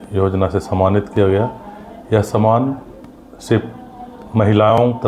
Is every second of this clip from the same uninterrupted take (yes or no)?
yes